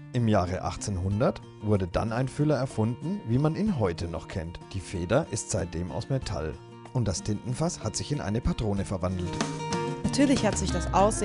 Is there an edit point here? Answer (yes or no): no